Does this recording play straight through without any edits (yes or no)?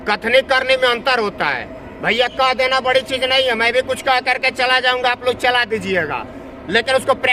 yes